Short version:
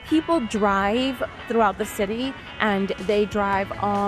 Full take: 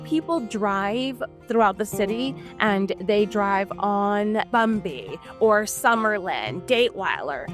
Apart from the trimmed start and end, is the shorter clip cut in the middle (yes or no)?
no